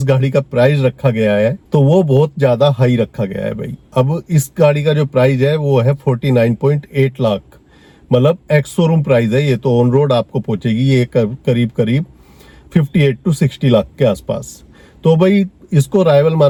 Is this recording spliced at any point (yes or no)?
no